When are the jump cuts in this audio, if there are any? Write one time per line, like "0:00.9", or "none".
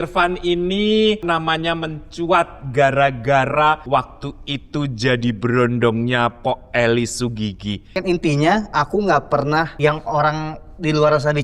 0:01.2
0:03.8
0:07.9
0:09.7